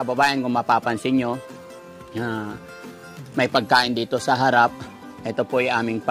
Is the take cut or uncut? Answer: uncut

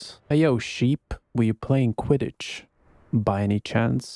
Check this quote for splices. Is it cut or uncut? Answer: uncut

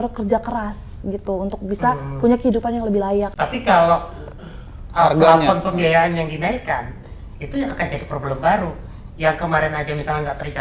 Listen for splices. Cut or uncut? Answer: cut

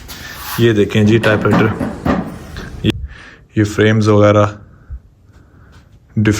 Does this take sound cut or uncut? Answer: cut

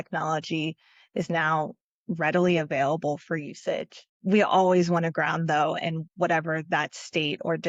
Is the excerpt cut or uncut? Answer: uncut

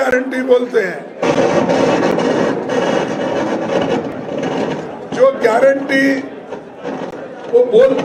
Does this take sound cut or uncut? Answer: uncut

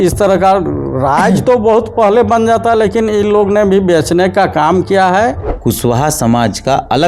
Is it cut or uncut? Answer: cut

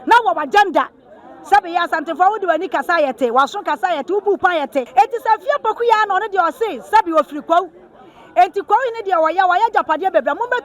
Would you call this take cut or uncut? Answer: cut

